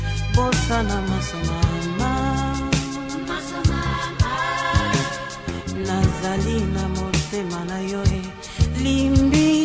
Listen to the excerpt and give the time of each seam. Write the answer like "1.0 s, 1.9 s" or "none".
none